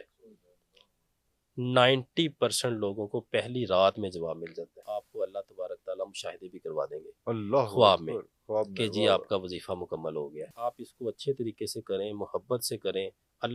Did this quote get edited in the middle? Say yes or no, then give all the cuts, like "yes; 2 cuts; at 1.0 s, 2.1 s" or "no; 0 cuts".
yes; 2 cuts; at 4.8 s, 10.5 s